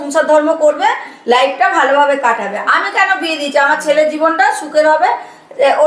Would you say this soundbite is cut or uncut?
uncut